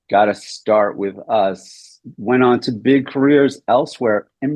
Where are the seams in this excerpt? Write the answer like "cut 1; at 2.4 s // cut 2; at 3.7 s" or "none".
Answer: none